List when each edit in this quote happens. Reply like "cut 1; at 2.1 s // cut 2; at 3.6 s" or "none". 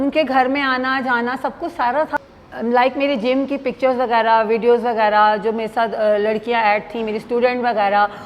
cut 1; at 2.2 s